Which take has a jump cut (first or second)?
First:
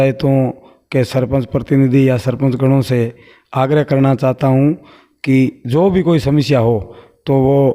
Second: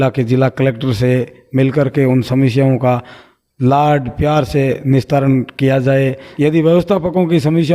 second